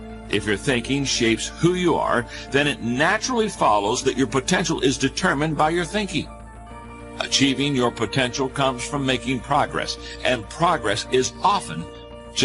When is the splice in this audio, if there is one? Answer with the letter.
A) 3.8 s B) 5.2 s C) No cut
A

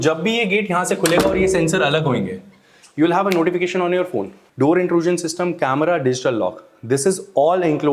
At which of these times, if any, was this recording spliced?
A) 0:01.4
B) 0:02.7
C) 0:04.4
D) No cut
C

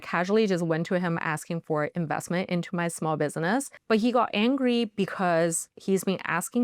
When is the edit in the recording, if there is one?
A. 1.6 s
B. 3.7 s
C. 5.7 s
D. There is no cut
B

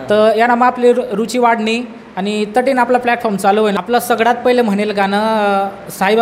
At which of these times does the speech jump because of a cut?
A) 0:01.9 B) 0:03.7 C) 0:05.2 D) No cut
B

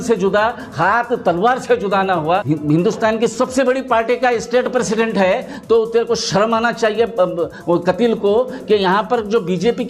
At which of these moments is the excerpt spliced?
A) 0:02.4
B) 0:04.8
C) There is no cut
A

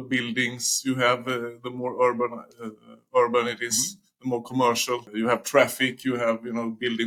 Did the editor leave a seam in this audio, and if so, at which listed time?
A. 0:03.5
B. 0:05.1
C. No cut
B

